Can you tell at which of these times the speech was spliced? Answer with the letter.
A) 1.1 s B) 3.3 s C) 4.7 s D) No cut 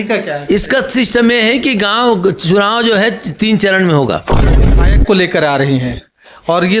C